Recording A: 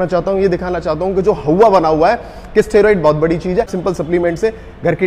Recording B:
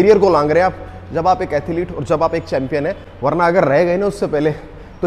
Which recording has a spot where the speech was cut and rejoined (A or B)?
A